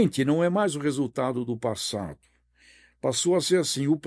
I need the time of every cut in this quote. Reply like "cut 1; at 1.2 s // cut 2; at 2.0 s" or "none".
none